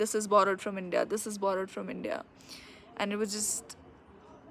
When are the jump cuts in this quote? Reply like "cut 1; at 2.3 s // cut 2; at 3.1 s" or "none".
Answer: none

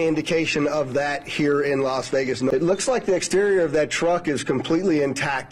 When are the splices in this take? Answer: cut 1; at 2.4 s

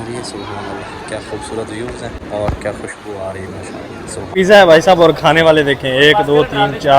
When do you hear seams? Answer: cut 1; at 2.2 s // cut 2; at 4.2 s

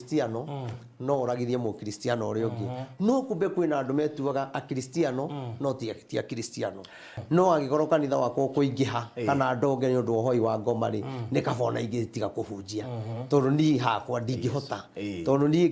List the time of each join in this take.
cut 1; at 7.1 s

